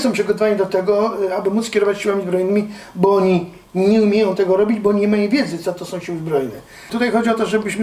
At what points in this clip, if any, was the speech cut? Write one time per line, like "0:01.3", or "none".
0:06.8